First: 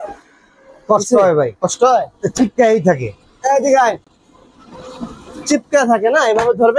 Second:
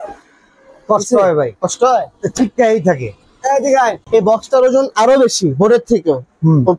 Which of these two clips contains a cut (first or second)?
second